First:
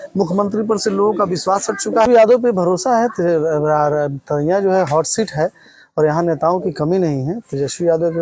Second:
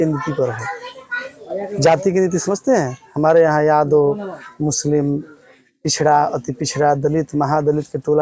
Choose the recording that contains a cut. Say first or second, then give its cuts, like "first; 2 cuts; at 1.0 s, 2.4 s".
first; 1 cut; at 2.1 s